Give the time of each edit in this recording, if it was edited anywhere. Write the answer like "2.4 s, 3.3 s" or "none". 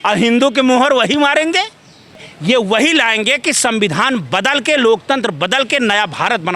2.3 s